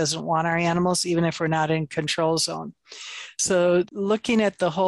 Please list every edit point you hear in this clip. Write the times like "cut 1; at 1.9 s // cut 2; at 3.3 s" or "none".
cut 1; at 3.9 s

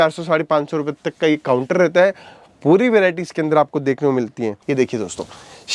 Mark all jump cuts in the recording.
cut 1; at 4.6 s

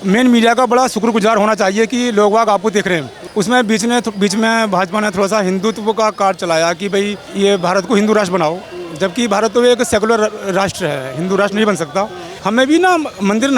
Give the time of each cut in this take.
cut 1; at 3.2 s // cut 2; at 7.2 s // cut 3; at 12.3 s

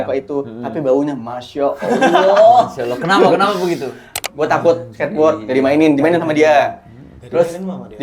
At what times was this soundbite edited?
cut 1; at 4.3 s

